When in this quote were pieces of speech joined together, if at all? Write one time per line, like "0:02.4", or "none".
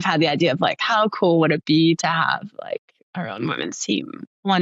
none